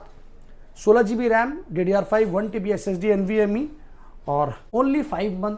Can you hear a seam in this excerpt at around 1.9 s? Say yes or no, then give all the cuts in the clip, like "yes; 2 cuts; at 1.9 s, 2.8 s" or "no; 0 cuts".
no; 1 cut; at 4.6 s